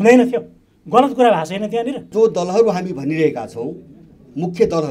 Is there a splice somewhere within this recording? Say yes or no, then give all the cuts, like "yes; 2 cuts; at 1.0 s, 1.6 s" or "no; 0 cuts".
yes; 1 cut; at 2.1 s